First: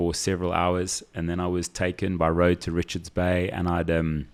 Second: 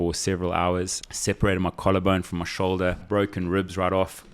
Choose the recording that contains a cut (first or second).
second